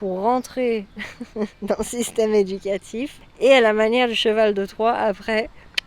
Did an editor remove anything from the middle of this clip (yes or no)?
yes